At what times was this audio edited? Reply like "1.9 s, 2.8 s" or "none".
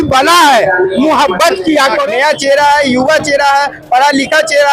2.0 s